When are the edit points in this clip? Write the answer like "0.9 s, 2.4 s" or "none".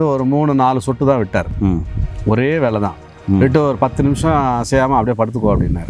none

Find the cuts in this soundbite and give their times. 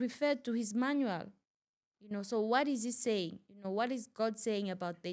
none

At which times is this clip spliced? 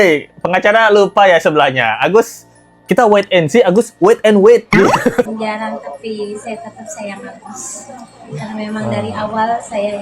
5.3 s

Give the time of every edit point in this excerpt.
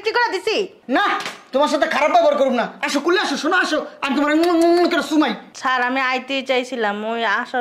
5.5 s

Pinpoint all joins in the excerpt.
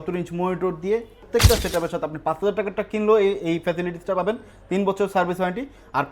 1.2 s

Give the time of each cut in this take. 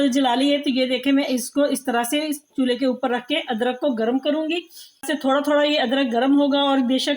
5.1 s

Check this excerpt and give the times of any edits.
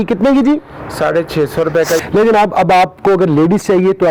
2.0 s

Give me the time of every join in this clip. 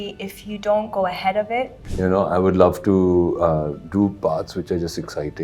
1.8 s

